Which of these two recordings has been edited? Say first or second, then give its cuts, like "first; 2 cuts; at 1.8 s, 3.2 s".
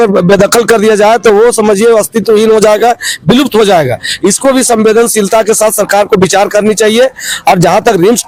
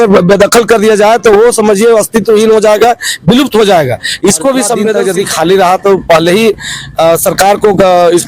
second; 1 cut; at 5.0 s